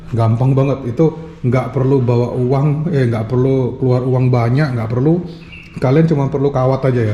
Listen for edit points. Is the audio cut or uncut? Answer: uncut